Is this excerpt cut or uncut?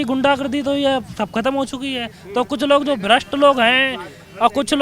uncut